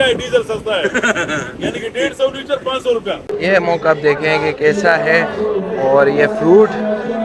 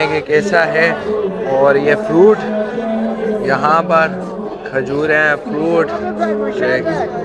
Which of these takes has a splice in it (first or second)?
first